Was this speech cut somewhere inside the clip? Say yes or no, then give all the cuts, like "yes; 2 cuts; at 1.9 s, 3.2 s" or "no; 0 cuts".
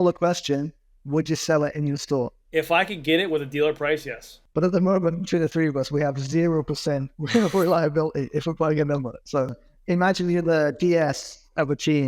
yes; 3 cuts; at 2.4 s, 4.4 s, 9.5 s